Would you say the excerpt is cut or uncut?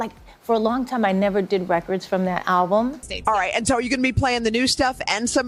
uncut